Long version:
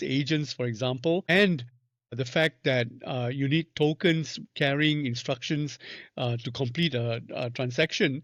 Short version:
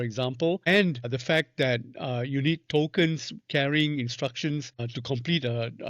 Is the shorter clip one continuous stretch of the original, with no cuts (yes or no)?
no